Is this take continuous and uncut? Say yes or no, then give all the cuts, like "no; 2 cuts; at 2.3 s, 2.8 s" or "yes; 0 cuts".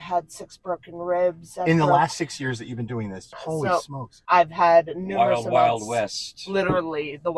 no; 1 cut; at 3.6 s